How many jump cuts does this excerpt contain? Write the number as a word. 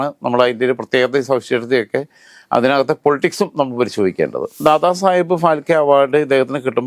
one